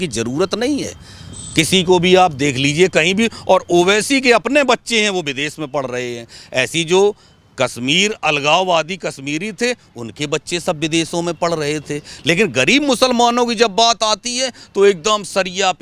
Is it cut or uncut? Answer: uncut